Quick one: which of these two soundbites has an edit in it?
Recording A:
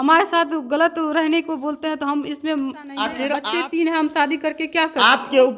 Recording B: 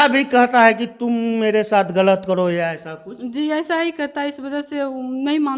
A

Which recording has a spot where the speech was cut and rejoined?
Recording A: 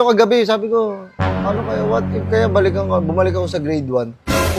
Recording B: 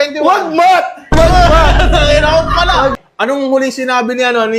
B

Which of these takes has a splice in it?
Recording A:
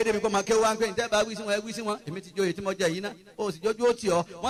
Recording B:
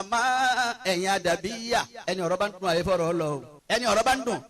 B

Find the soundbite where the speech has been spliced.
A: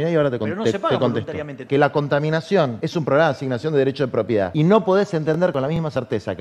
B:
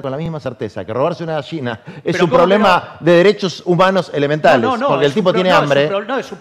A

